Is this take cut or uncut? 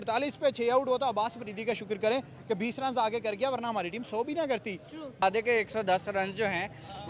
cut